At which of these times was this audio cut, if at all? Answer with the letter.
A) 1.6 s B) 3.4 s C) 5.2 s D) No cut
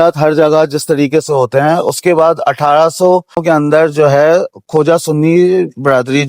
B